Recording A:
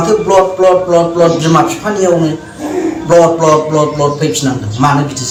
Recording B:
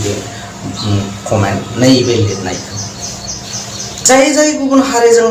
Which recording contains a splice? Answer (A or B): B